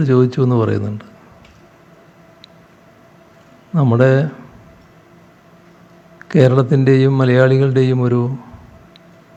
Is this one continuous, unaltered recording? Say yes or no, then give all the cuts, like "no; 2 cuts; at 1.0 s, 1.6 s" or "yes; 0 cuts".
yes; 0 cuts